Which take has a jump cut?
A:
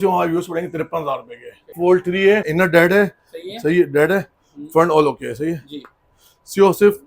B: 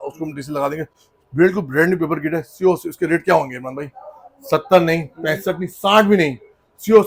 A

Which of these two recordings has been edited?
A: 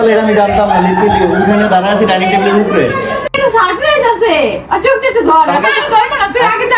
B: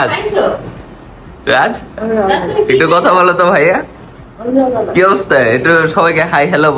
A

